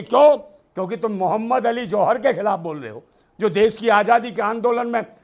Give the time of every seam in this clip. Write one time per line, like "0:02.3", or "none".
none